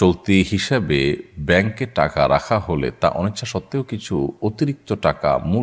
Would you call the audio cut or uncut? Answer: uncut